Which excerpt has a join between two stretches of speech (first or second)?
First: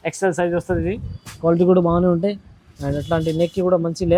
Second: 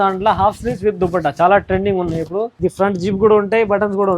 second